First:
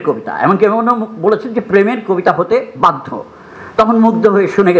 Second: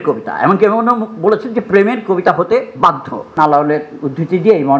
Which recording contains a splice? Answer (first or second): second